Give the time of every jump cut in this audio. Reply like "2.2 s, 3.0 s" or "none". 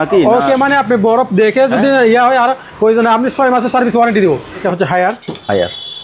4.6 s